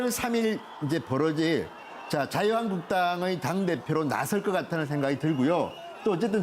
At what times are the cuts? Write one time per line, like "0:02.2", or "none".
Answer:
0:01.3